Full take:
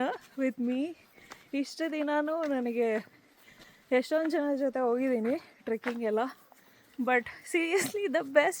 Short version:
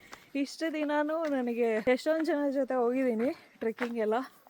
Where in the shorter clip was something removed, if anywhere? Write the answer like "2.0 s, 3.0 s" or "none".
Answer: 1.8 s